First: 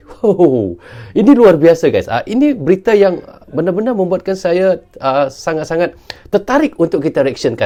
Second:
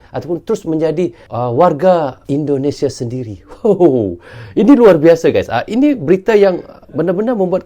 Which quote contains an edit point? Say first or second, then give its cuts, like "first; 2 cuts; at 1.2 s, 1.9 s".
second; 2 cuts; at 1.2 s, 2.2 s